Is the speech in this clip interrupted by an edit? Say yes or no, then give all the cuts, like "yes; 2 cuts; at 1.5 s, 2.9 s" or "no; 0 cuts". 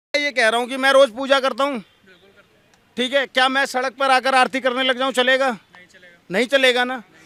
no; 0 cuts